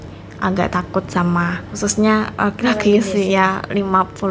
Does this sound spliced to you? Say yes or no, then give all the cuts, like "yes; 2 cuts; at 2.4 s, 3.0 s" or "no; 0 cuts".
yes; 1 cut; at 1.7 s